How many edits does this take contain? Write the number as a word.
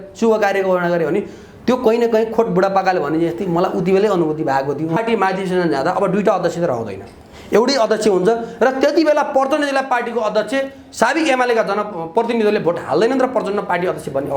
one